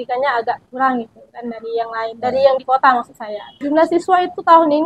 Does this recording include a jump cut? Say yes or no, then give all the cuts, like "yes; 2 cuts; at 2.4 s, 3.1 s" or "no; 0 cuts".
yes; 1 cut; at 3.5 s